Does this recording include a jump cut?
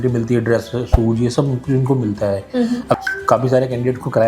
yes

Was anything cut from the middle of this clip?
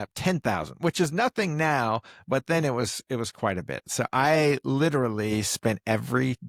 no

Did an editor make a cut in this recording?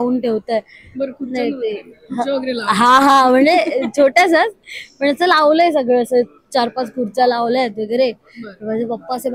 no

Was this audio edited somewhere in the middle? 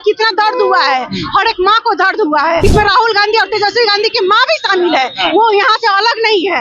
yes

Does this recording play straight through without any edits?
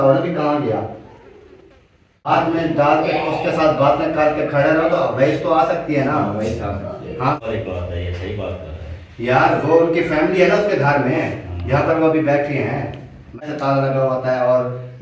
no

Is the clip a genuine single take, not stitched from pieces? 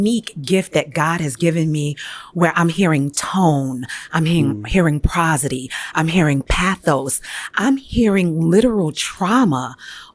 yes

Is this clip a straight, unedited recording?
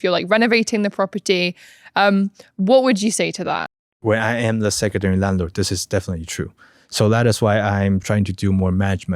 no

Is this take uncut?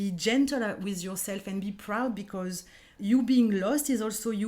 no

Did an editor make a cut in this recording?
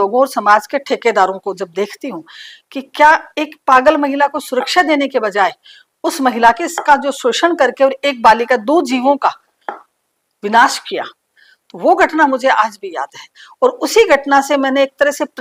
no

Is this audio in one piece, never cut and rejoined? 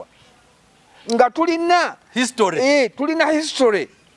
yes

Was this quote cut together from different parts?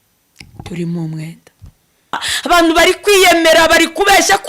yes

